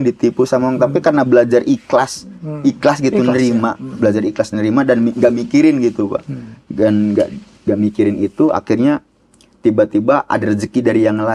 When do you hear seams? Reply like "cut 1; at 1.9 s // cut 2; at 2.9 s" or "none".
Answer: none

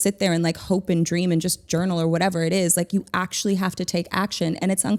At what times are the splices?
none

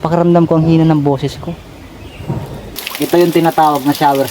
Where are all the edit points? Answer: cut 1; at 2.6 s

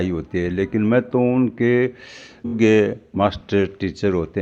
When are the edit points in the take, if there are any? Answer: cut 1; at 2.5 s

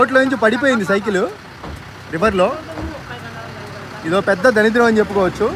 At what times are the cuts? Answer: none

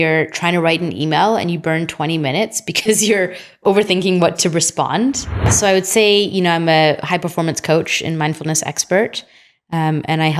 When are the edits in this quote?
cut 1; at 5.5 s

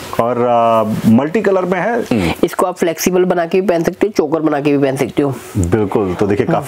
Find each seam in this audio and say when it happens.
cut 1; at 2.1 s

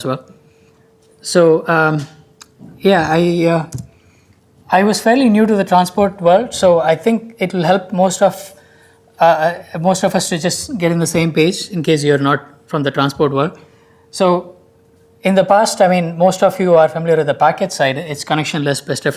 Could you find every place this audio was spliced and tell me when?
cut 1; at 9.4 s

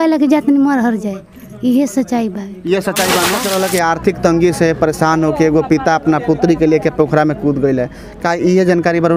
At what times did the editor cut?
cut 1; at 3.4 s

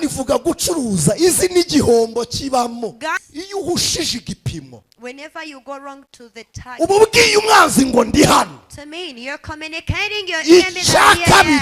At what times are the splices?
cut 1; at 3.3 s

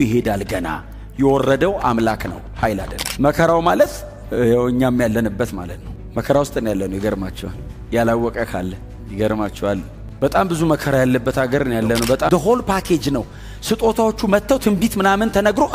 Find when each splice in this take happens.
cut 1; at 3.0 s // cut 2; at 12.3 s

